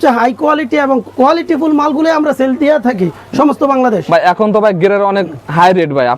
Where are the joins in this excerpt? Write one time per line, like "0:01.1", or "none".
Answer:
none